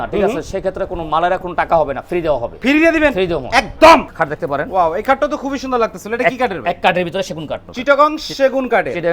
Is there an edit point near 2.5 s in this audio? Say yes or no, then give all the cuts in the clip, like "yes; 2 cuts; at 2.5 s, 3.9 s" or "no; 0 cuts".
no; 2 cuts; at 4.1 s, 7.6 s